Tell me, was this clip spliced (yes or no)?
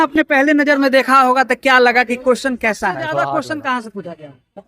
yes